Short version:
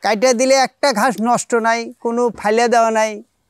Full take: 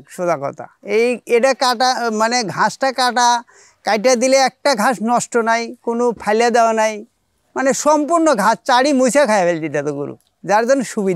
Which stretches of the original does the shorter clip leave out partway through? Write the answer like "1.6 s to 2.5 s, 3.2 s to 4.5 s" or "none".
none